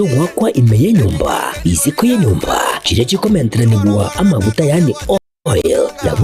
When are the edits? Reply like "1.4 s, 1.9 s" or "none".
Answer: none